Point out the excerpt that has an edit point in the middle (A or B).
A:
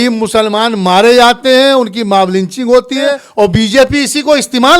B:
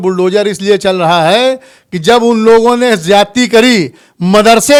A